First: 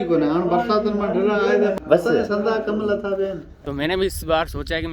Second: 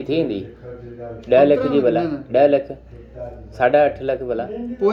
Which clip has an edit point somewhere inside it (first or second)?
first